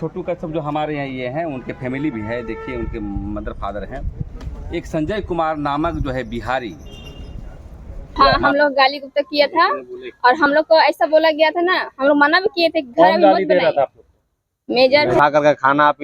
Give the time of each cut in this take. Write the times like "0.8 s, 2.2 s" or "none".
8.1 s, 15.2 s